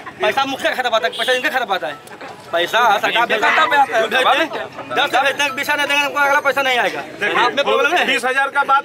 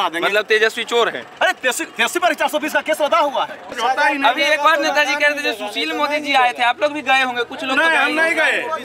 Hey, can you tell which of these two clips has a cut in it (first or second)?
second